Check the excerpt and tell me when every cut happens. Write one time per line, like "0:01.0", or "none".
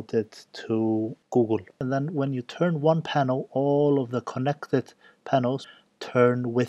0:01.6
0:05.7